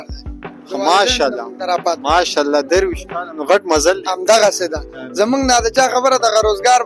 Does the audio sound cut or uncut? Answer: uncut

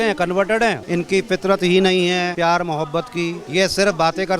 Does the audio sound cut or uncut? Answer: cut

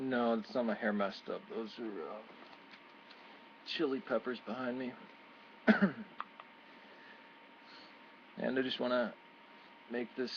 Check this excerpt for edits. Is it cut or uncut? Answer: uncut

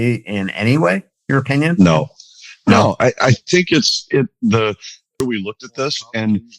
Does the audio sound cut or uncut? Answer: cut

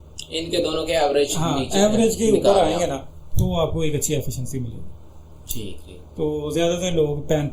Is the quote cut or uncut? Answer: uncut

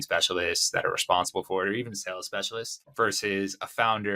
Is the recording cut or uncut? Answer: cut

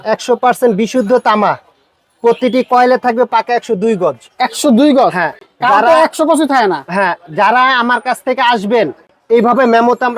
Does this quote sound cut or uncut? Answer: uncut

